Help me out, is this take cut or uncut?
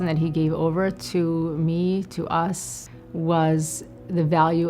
uncut